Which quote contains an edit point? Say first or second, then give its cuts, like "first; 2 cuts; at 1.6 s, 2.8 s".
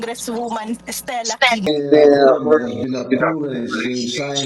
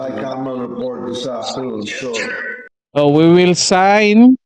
first; 1 cut; at 1.7 s